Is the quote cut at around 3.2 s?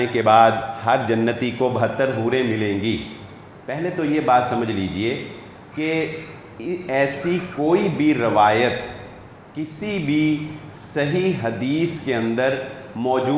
no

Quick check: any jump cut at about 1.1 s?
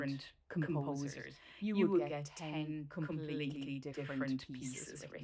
no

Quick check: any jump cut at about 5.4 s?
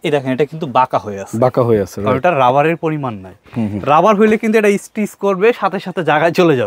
no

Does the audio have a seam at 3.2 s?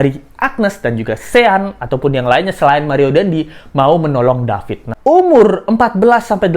no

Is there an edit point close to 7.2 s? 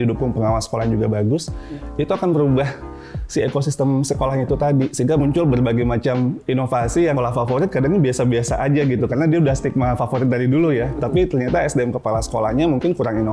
yes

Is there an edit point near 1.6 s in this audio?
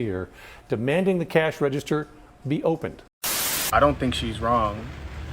no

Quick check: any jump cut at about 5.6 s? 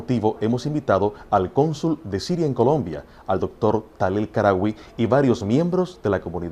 yes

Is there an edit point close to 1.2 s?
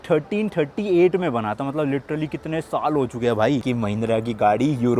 no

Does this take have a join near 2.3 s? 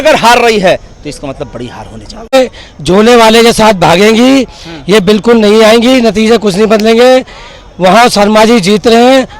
yes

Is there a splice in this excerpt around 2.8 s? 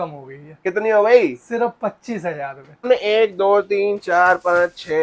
yes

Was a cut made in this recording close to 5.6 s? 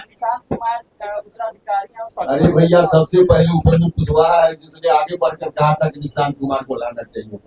no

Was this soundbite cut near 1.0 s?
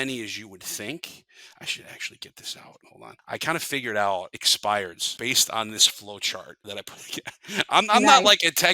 no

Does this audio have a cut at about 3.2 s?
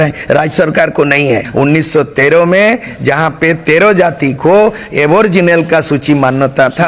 no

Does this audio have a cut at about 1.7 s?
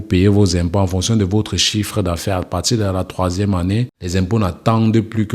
no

